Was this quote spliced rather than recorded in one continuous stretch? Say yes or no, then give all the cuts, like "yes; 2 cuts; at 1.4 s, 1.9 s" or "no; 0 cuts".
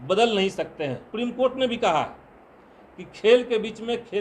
yes; 1 cut; at 1.0 s